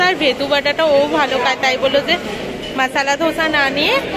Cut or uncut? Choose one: uncut